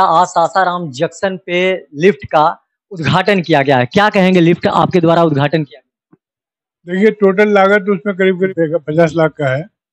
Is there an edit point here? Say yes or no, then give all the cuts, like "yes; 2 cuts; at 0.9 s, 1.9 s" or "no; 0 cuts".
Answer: yes; 1 cut; at 8.5 s